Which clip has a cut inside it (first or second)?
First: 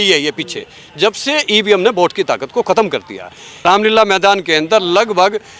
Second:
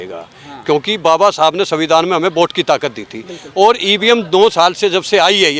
first